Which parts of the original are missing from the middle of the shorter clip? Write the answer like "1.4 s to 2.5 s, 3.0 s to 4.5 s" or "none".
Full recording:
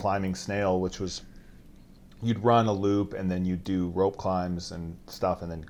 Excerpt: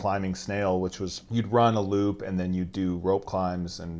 1.2 s to 2.1 s